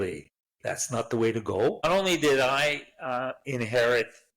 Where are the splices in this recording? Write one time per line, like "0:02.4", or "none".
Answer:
0:01.8